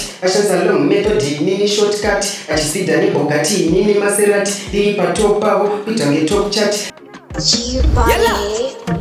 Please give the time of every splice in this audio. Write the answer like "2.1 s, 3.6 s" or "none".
6.9 s